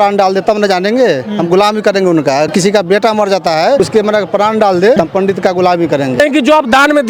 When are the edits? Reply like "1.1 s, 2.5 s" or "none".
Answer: 2.5 s, 3.8 s, 5.0 s, 6.2 s

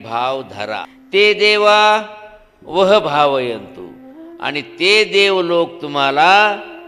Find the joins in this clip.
0.9 s

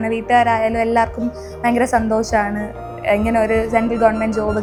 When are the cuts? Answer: none

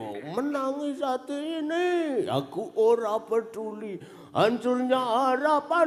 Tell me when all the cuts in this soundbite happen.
none

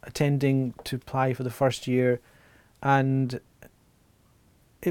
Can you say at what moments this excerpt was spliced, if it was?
none

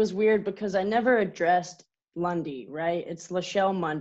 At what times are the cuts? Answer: none

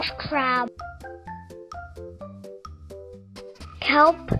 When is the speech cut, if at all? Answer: 0.9 s, 3.3 s

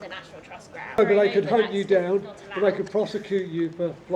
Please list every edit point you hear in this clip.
1.0 s

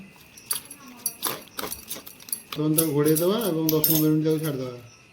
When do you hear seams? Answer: 2.6 s

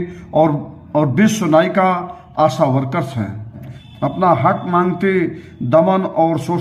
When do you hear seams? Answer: 3.7 s

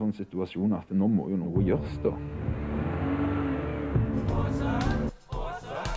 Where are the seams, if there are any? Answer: 1.5 s, 5.1 s

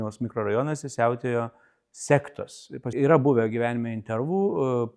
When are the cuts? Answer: 2.9 s

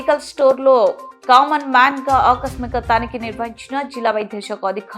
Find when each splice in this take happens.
none

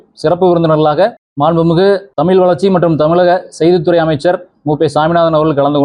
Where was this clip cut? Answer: 1.2 s, 2.1 s

